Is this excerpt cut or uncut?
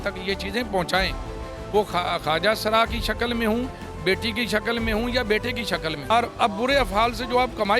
cut